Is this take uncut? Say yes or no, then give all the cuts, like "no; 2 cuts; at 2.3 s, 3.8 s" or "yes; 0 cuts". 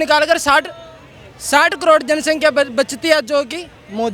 yes; 0 cuts